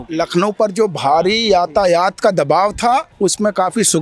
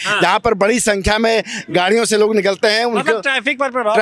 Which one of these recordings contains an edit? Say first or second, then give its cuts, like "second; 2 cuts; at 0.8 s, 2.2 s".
first; 1 cut; at 3.1 s